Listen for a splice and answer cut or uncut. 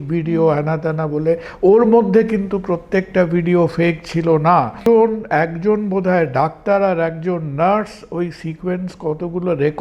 cut